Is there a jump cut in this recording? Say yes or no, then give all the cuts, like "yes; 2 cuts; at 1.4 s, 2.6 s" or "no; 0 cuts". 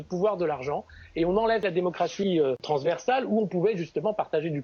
yes; 2 cuts; at 1.6 s, 2.6 s